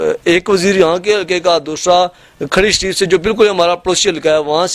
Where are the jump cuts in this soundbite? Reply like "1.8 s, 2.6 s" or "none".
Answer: none